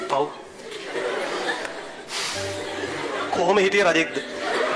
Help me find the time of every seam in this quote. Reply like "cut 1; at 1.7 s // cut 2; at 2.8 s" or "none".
none